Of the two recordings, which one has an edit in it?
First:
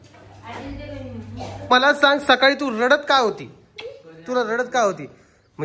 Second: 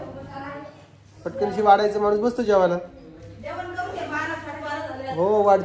first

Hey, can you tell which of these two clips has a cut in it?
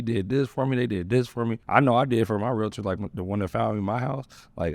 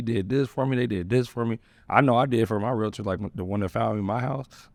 first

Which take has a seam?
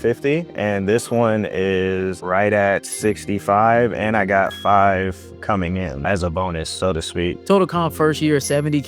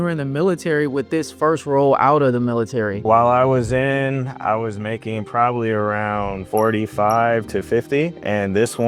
first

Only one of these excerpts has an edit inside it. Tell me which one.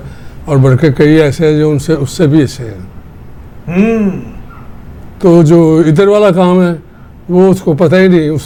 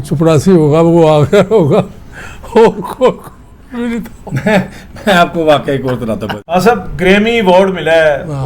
second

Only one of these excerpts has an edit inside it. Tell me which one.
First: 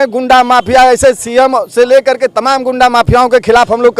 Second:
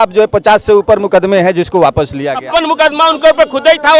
second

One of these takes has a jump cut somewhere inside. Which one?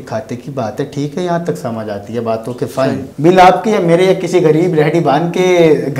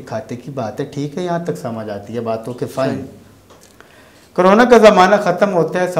first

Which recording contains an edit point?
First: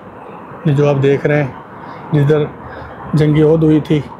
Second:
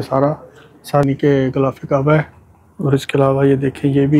second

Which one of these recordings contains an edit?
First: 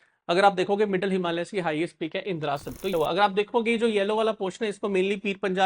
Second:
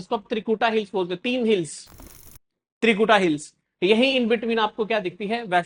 first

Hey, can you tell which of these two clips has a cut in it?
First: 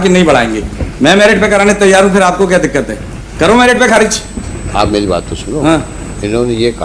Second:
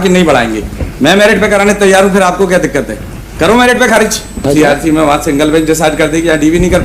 second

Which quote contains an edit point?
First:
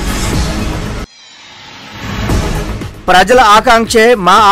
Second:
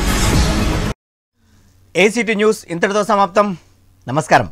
first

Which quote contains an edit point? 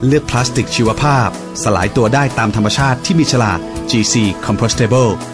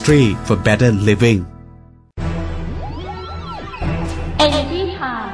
second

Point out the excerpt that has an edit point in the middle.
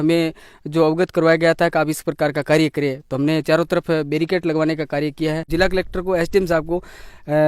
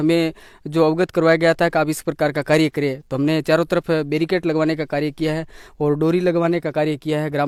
first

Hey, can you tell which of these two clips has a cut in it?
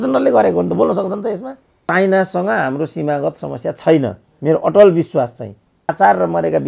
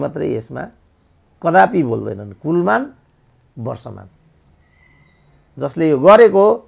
first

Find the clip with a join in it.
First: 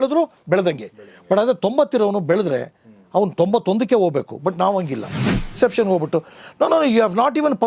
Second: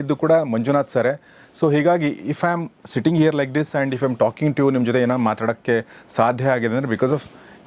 first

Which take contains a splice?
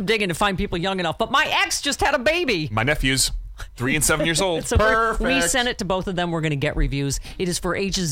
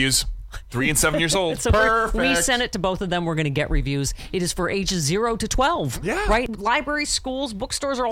second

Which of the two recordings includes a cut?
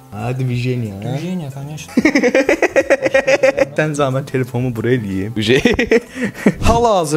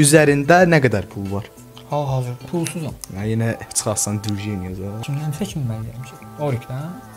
second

